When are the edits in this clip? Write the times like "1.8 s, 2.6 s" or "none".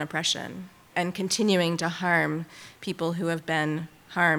0.9 s